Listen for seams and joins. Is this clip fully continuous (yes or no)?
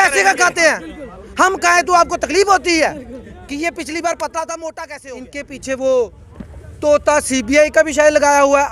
no